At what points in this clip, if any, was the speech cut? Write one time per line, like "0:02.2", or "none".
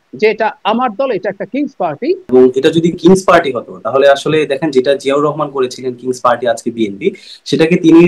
0:02.2